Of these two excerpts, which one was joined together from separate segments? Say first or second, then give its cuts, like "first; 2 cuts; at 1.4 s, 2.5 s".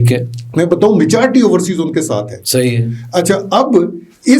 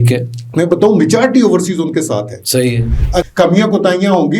second; 1 cut; at 3.2 s